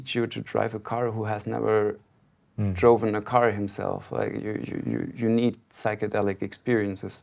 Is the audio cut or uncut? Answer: uncut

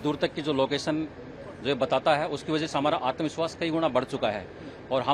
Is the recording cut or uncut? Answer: uncut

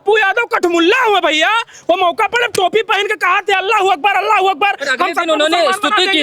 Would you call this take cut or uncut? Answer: uncut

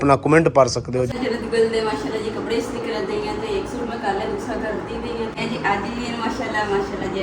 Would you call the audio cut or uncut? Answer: cut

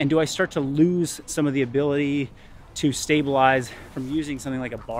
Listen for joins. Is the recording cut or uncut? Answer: cut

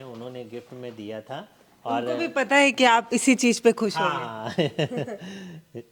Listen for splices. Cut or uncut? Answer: uncut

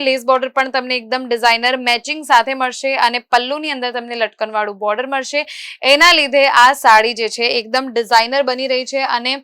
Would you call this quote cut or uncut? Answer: uncut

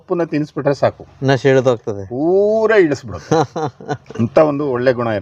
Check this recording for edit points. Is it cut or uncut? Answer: uncut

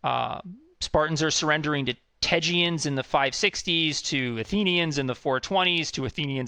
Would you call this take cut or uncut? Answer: uncut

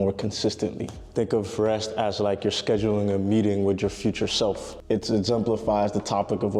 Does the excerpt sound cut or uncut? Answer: cut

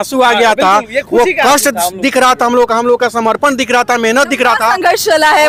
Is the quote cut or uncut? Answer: uncut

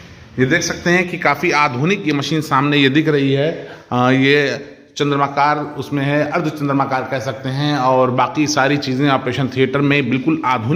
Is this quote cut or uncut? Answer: uncut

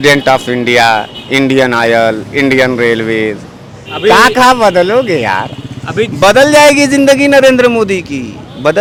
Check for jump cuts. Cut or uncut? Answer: uncut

